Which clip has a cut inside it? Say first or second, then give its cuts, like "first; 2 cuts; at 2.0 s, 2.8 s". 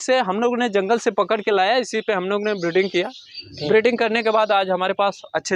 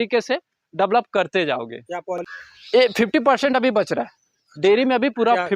second; 1 cut; at 2.1 s